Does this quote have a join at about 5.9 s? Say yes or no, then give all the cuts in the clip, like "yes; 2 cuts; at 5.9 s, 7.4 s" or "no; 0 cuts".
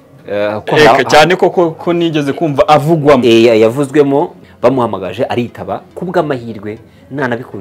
no; 1 cut; at 4.4 s